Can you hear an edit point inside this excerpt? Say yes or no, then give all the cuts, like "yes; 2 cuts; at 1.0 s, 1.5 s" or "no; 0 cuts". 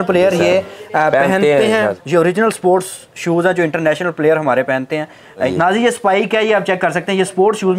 yes; 2 cuts; at 2.0 s, 5.5 s